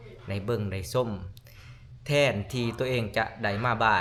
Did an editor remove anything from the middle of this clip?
no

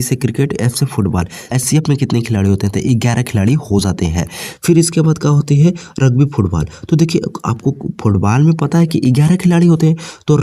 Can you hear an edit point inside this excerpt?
yes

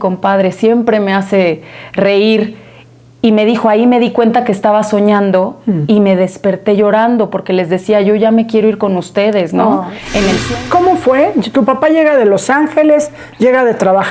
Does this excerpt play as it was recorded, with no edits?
no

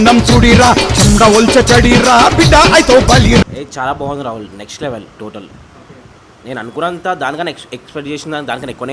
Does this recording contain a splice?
yes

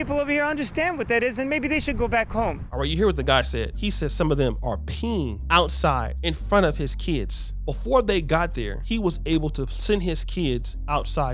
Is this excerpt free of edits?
yes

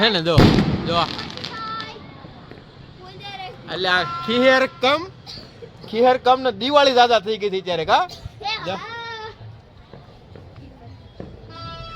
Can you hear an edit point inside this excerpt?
no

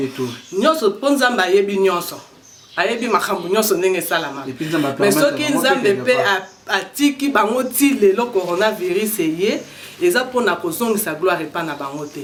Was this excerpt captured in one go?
yes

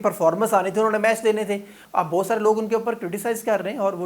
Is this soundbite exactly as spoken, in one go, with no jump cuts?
no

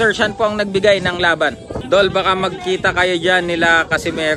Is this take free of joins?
no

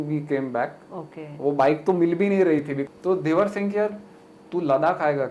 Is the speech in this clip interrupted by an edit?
yes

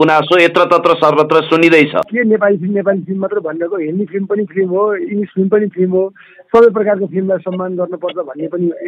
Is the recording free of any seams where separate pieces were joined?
no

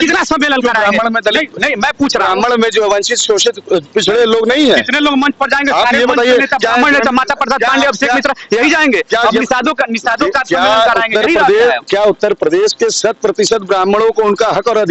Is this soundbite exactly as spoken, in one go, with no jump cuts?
yes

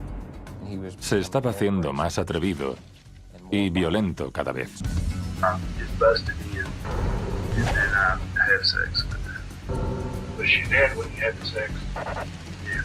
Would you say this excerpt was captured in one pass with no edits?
no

